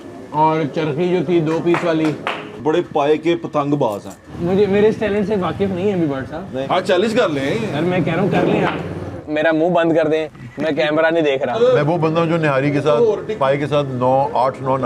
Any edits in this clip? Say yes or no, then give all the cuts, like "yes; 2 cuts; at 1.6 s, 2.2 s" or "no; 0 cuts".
yes; 4 cuts; at 2.5 s, 4.3 s, 9.3 s, 11.6 s